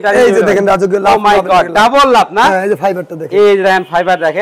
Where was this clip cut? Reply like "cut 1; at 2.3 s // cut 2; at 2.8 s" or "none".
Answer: none